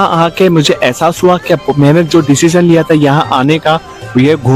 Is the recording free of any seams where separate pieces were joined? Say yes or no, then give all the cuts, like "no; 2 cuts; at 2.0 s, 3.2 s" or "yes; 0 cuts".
yes; 0 cuts